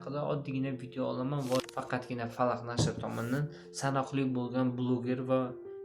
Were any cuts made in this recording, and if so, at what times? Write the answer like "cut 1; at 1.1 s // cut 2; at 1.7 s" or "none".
cut 1; at 1.7 s